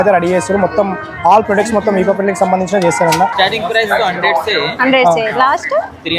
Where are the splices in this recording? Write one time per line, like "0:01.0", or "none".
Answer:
0:03.3